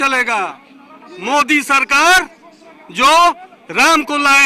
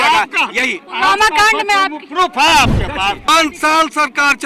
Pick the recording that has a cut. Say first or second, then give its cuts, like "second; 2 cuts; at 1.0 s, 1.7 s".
second; 1 cut; at 3.3 s